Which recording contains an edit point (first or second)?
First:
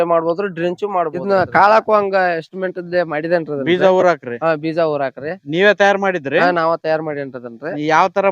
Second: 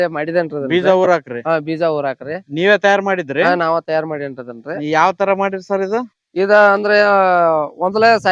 first